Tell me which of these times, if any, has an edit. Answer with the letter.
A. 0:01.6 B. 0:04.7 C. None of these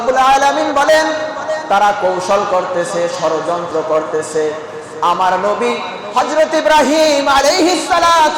A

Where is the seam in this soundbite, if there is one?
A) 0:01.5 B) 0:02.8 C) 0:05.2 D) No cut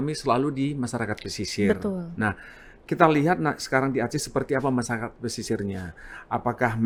D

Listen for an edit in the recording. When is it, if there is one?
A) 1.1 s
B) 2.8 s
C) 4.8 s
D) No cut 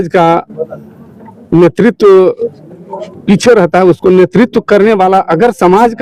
D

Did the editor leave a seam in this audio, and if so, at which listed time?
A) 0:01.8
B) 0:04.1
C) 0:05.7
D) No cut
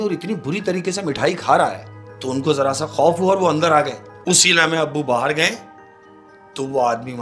B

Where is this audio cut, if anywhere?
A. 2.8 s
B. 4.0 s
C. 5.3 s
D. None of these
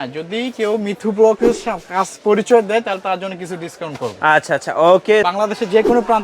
C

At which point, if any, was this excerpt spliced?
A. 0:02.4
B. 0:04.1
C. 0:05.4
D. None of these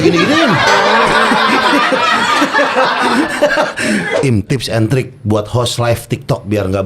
B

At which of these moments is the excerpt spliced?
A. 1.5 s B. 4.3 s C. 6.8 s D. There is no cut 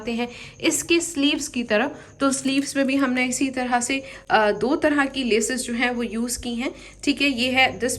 D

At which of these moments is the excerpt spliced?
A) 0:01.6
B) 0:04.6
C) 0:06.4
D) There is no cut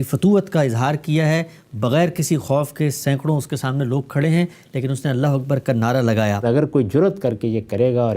C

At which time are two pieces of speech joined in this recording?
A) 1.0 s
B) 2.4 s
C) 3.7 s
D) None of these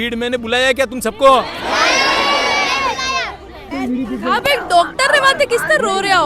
C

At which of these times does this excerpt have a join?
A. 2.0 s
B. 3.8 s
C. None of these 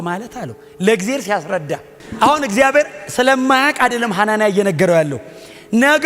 A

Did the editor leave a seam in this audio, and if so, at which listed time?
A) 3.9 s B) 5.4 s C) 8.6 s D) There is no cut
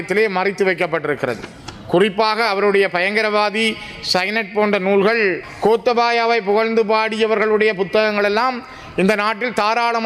B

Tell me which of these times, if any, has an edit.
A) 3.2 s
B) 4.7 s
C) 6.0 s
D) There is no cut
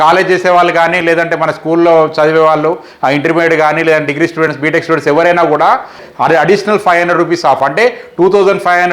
C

